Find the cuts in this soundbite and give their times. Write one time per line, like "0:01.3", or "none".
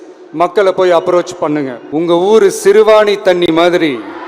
0:01.8